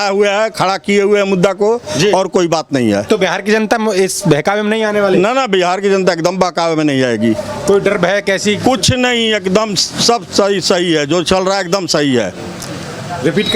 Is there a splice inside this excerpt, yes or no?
no